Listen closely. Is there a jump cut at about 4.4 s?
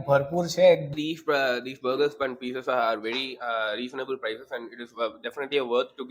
no; 1 cut; at 0.9 s

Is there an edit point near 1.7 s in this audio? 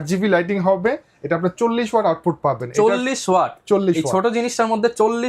no; 0 cuts

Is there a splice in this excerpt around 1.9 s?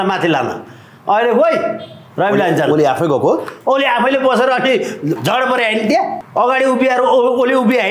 no; 1 cut; at 6.2 s

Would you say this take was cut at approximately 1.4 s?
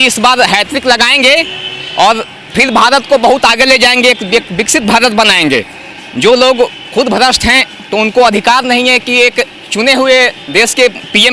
no; 0 cuts

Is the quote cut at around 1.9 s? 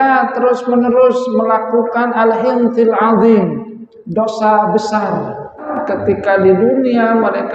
no; 1 cut; at 5.7 s

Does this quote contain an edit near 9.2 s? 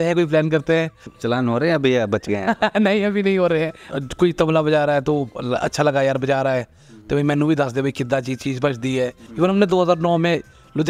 yes; 3 cuts; at 1.1 s, 3.8 s, 9.2 s

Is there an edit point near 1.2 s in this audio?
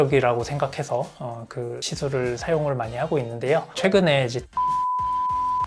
no; 1 cut; at 3.7 s

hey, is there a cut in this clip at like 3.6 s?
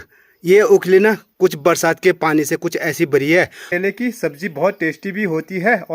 yes; 1 cut; at 3.6 s

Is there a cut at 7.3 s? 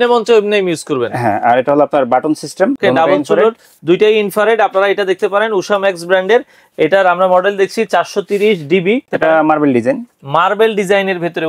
no; 2 cuts; at 2.8 s, 9.1 s

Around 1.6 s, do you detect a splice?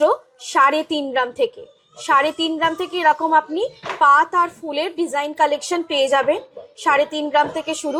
no; 0 cuts

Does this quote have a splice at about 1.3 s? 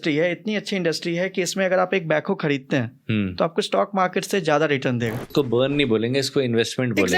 no; 1 cut; at 5.3 s

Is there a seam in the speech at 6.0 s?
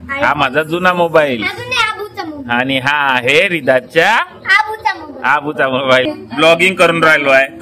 yes; 1 cut; at 6.0 s

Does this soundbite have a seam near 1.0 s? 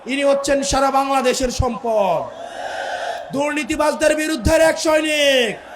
no; 1 cut; at 3.2 s

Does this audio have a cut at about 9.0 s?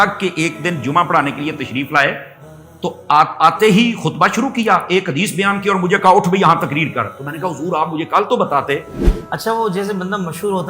yes; 1 cut; at 9.0 s

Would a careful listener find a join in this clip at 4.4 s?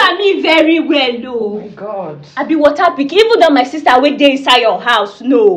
no; 0 cuts

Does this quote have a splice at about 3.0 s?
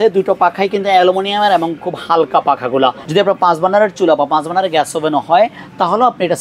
yes; 1 cut; at 3.0 s

